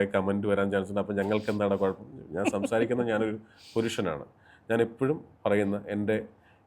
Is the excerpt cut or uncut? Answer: uncut